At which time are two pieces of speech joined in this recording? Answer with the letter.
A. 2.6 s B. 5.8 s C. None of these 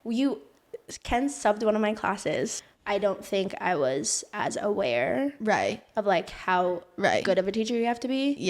A